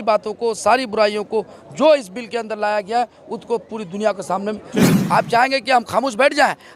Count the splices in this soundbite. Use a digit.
1